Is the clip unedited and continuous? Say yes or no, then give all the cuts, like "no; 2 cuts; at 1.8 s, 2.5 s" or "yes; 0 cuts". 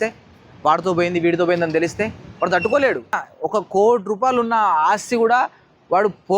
no; 1 cut; at 3.3 s